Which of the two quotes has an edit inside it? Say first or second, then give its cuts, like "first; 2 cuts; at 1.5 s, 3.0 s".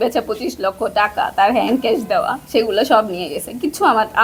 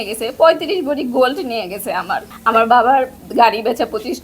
second; 1 cut; at 2.3 s